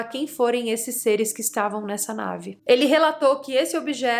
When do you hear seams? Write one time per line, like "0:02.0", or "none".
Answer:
none